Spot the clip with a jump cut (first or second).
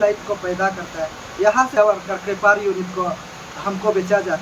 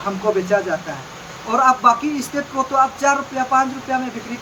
first